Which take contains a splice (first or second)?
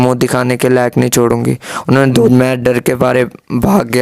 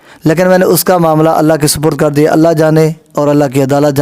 first